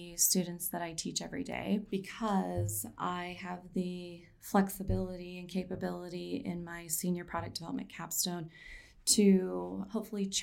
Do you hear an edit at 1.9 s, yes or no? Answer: yes